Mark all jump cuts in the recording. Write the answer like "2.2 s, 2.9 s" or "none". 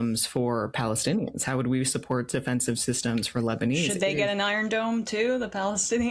4.9 s